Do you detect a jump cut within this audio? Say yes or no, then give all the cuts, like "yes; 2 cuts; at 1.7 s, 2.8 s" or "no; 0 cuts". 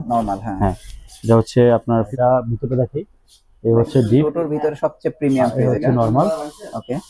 yes; 1 cut; at 2.1 s